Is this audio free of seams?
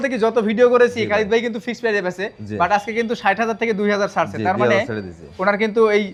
yes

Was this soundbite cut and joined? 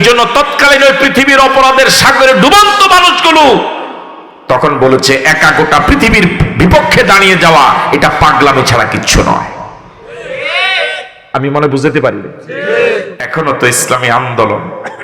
yes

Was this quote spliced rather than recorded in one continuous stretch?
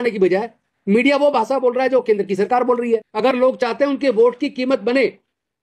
yes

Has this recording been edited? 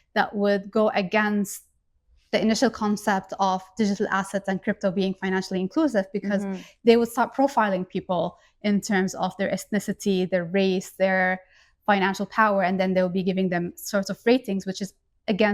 no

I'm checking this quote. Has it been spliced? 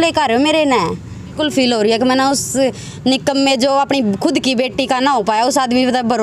yes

